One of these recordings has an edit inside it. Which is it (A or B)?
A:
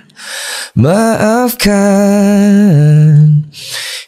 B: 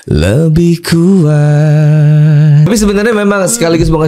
B